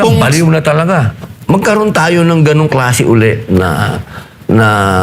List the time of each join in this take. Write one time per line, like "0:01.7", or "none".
0:01.2